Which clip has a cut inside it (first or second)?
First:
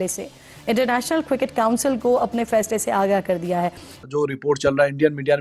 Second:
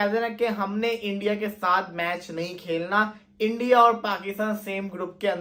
first